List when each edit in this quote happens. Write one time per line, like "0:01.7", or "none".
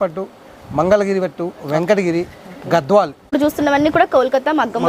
0:03.3